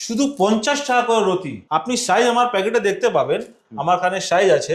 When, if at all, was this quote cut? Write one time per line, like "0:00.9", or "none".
0:01.5